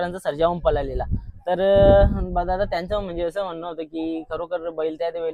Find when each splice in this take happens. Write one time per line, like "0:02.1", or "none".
none